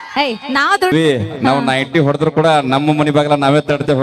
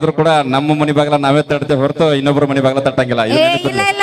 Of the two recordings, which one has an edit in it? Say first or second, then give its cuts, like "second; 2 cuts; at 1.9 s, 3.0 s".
first; 1 cut; at 0.9 s